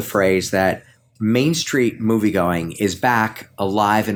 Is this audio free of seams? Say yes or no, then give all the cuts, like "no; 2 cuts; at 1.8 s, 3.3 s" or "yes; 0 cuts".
yes; 0 cuts